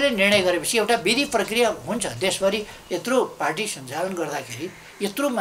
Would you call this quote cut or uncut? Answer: uncut